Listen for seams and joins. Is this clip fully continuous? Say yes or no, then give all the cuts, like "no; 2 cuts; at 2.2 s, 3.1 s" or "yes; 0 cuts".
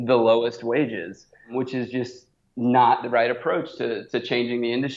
no; 1 cut; at 1.5 s